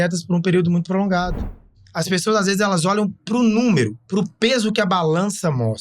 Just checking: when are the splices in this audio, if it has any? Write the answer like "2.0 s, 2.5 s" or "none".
1.6 s

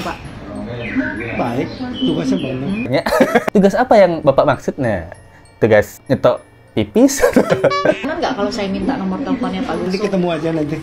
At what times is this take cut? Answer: 2.9 s, 8.0 s, 9.9 s

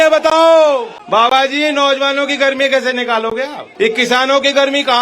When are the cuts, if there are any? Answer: 0.9 s, 3.6 s

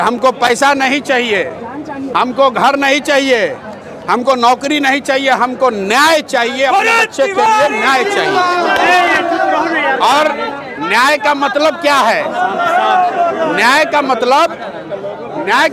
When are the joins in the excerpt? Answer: none

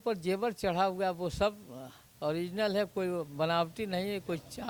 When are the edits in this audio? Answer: none

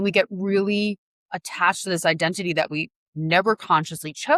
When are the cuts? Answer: none

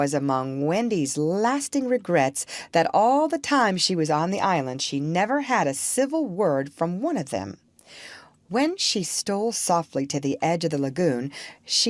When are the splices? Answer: none

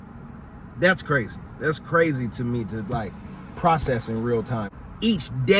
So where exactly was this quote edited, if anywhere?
4.7 s

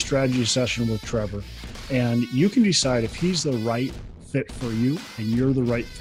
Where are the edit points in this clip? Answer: none

